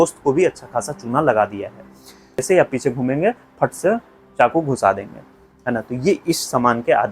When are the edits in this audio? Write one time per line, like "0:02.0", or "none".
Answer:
0:02.4